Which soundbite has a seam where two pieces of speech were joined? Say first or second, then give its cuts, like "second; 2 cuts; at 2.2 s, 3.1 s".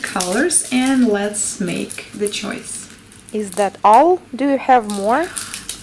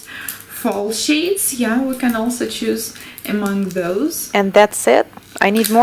second; 1 cut; at 2.7 s